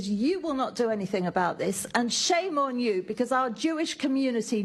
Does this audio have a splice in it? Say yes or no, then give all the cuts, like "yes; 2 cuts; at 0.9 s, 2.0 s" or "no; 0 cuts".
no; 0 cuts